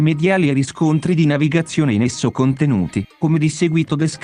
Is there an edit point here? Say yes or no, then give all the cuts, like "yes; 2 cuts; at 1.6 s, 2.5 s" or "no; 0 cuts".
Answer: yes; 1 cut; at 3.2 s